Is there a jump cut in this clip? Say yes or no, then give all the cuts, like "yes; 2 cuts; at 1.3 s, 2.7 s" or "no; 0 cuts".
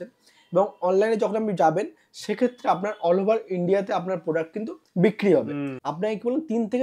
yes; 1 cut; at 5.8 s